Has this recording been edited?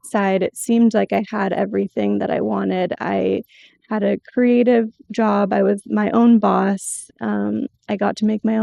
no; 0 cuts

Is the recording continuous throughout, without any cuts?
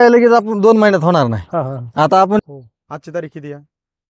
no; 1 cut; at 2.4 s

